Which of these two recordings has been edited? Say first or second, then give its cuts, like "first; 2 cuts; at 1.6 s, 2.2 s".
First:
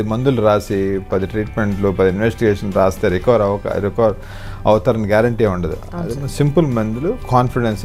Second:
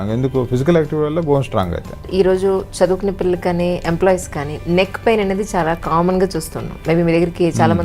second; 1 cut; at 2.1 s